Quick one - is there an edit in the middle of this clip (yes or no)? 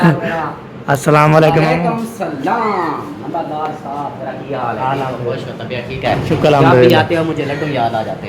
no